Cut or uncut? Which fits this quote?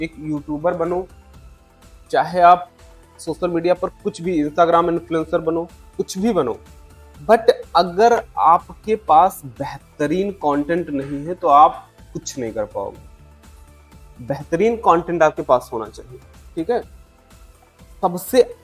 uncut